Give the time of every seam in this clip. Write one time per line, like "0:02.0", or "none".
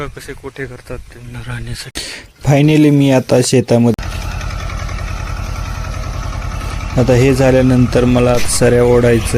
0:01.9
0:03.9